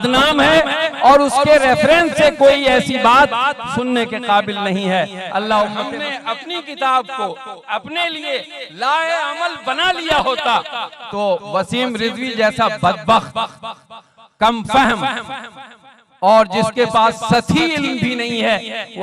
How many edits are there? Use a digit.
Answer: 1